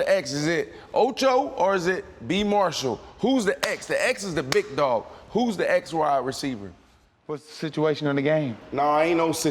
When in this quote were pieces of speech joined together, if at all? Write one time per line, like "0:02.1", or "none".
none

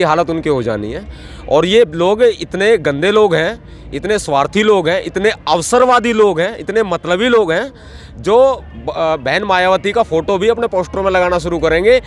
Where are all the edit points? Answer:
none

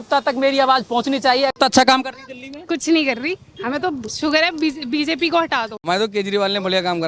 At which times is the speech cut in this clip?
0:01.5
0:05.8

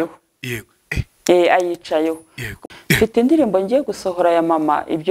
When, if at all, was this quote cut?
0:02.6

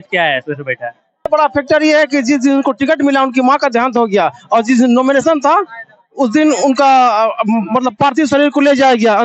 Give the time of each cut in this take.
0:01.3

